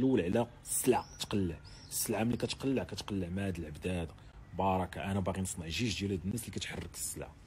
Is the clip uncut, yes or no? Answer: yes